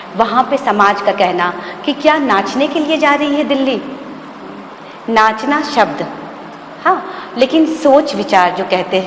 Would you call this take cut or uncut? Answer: uncut